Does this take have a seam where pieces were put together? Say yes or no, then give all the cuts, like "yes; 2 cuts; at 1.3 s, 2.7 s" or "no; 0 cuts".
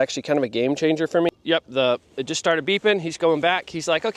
yes; 1 cut; at 1.3 s